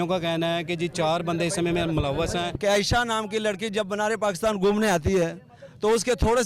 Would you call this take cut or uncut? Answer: cut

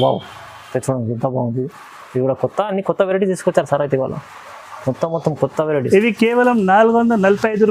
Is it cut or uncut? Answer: uncut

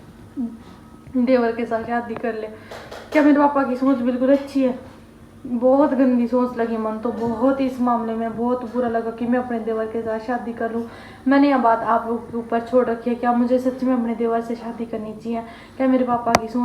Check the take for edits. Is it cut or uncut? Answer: uncut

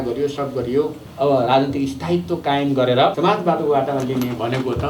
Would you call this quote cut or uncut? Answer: cut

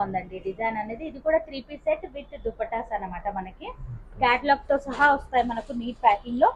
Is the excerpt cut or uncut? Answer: uncut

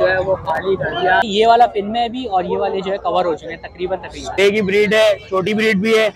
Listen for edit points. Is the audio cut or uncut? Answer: cut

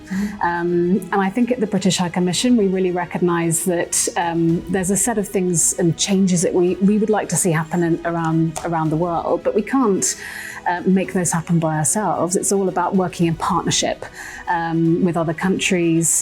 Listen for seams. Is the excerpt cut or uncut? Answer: uncut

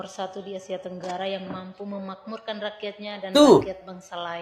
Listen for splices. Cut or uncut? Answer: uncut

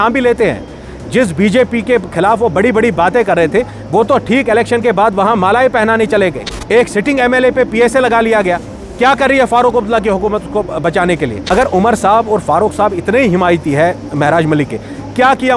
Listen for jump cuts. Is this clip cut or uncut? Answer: cut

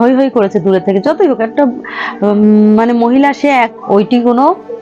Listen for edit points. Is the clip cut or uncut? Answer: cut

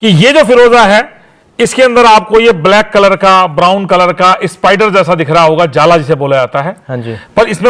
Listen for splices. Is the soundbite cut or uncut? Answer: uncut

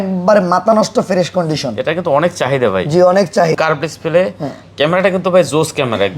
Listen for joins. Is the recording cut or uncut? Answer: cut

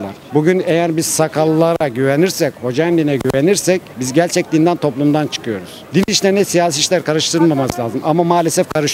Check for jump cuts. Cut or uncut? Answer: uncut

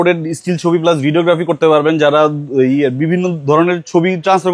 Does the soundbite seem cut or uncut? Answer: uncut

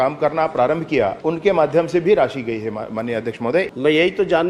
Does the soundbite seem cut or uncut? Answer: cut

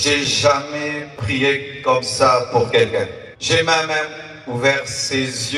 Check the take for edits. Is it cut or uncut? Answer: cut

